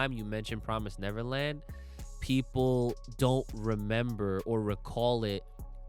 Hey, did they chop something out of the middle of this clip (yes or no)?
no